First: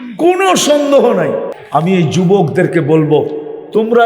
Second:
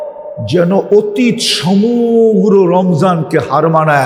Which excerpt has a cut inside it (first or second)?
first